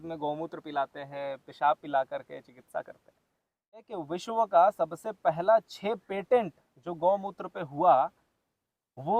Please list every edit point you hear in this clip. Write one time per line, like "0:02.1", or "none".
0:03.9